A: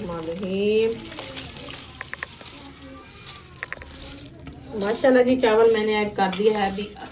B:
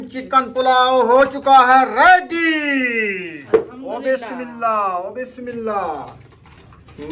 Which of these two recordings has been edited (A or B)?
B